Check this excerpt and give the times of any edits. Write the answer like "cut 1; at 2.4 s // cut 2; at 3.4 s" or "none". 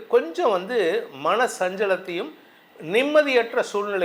none